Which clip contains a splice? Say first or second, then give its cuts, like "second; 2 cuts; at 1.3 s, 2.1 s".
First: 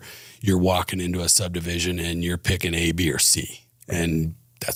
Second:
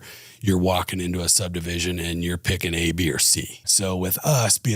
second; 1 cut; at 3.6 s